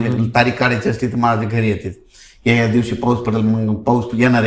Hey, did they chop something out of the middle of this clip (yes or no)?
no